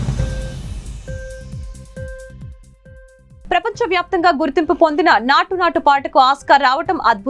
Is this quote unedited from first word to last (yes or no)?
no